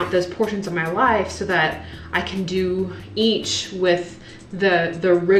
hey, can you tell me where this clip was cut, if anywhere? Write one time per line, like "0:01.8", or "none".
none

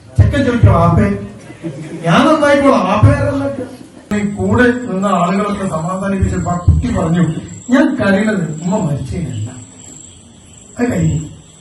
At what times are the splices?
0:04.1

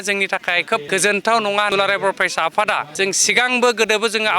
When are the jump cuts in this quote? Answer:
0:00.8
0:01.7
0:02.9

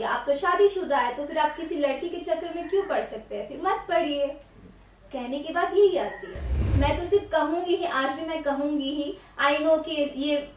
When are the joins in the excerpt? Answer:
0:06.6

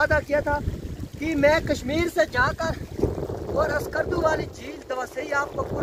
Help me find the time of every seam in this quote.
none

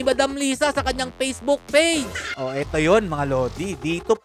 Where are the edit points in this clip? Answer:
0:02.3

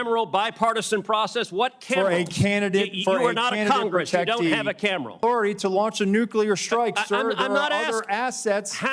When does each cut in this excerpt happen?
0:05.2

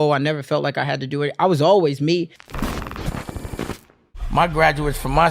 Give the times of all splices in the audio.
0:02.3

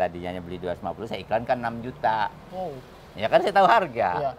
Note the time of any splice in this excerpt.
0:02.4

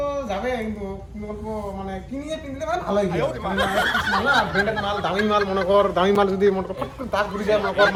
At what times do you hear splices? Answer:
none

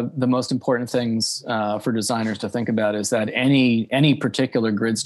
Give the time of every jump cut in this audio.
none

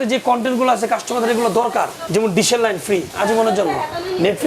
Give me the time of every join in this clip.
0:03.1

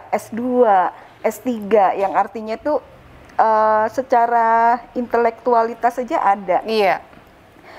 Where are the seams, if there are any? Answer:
none

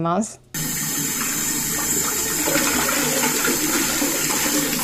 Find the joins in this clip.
none

